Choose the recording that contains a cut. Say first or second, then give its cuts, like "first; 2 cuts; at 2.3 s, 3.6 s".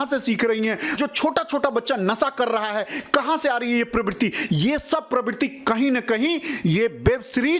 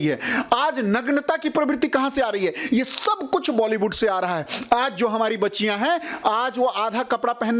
first; 1 cut; at 0.9 s